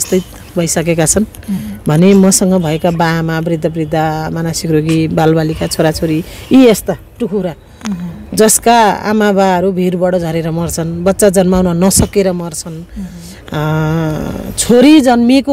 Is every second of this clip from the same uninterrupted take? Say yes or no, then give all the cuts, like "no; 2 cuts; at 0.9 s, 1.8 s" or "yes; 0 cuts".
yes; 0 cuts